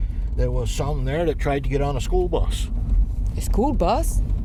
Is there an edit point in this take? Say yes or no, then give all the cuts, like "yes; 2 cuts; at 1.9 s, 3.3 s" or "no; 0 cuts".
no; 0 cuts